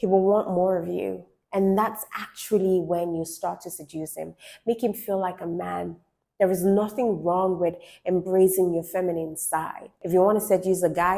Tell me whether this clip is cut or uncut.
cut